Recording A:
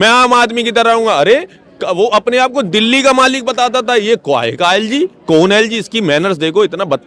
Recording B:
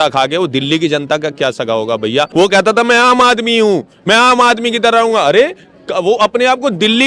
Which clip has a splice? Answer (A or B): B